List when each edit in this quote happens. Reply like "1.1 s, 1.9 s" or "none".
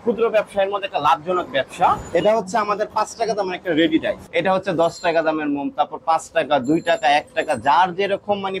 2.0 s, 4.2 s